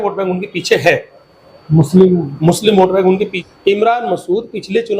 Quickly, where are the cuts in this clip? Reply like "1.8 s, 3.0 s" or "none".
3.3 s